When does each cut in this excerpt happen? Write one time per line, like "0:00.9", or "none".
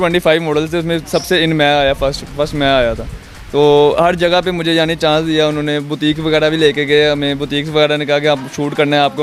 none